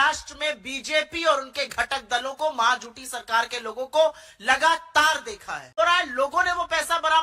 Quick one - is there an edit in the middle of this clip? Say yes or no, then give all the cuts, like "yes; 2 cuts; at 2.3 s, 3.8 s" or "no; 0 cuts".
yes; 1 cut; at 5.8 s